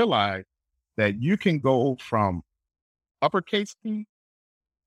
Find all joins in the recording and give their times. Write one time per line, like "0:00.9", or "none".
none